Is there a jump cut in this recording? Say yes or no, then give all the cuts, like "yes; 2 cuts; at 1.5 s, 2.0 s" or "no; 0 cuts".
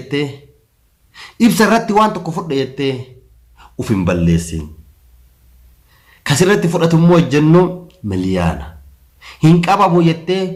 no; 0 cuts